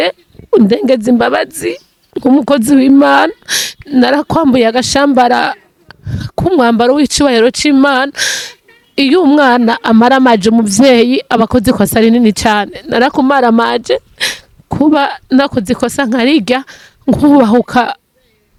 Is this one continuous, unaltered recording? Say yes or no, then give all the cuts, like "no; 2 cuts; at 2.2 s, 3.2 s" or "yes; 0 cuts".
yes; 0 cuts